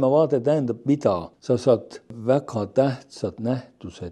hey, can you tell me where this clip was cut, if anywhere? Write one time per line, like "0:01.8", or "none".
0:01.3
0:02.1